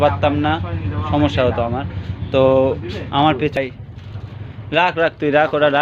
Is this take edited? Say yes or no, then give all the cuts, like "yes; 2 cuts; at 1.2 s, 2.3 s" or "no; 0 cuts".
yes; 1 cut; at 3.6 s